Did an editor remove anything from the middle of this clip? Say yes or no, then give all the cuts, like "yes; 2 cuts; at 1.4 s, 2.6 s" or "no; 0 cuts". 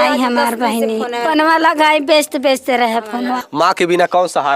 yes; 2 cuts; at 1.2 s, 3.4 s